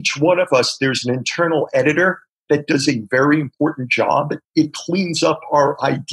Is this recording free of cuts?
yes; 0 cuts

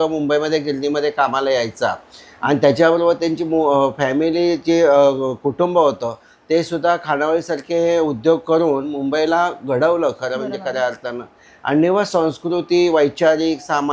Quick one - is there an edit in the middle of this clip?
no; 0 cuts

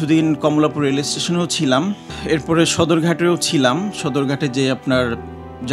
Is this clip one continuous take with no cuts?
yes; 0 cuts

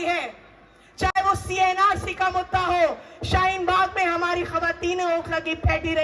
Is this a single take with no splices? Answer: yes; 0 cuts

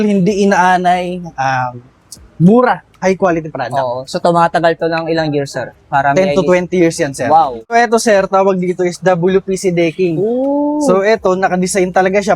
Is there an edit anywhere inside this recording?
yes; 1 cut; at 7.7 s

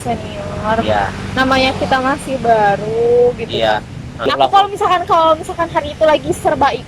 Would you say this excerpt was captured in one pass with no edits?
no; 1 cut; at 4.3 s

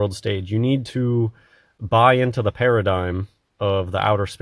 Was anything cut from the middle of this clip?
no; 0 cuts

